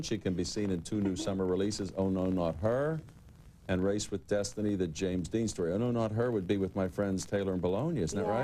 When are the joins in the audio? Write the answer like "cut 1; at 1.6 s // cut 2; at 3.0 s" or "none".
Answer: none